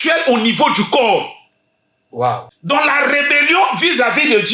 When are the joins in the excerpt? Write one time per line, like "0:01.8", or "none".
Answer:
0:02.5